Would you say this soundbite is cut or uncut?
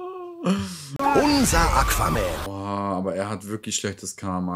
cut